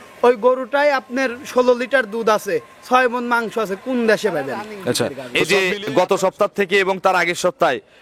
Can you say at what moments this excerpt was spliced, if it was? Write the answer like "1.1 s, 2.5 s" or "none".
5.2 s